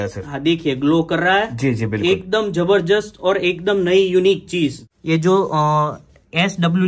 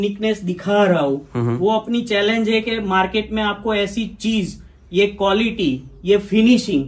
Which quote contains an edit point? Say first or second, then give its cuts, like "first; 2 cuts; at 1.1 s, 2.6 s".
first; 1 cut; at 4.8 s